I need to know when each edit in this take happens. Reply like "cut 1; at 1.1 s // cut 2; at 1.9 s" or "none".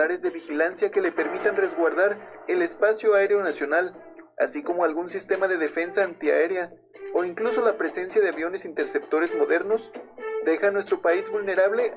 none